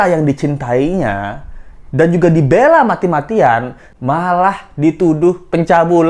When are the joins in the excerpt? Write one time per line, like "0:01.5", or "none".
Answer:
0:03.8